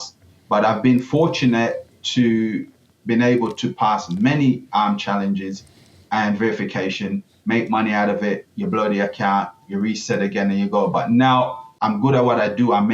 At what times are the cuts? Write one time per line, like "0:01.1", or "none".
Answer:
0:11.7